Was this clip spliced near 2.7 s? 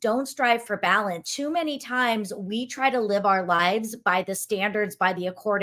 no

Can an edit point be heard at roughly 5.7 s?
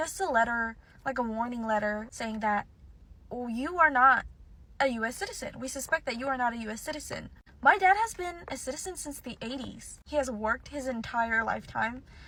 no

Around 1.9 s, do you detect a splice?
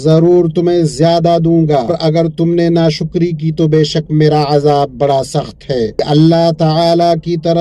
yes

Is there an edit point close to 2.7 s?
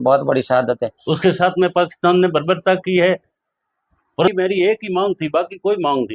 no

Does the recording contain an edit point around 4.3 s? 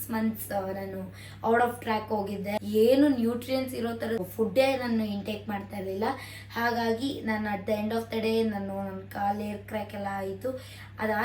yes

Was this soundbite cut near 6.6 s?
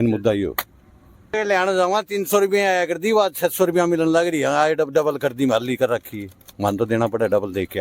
no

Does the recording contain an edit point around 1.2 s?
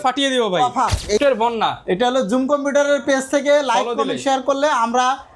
yes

